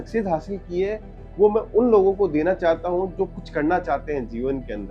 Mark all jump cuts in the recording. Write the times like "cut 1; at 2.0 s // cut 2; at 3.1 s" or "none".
none